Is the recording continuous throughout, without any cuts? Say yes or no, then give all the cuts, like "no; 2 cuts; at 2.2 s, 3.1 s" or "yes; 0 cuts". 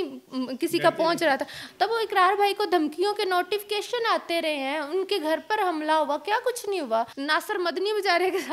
no; 2 cuts; at 1.6 s, 7.2 s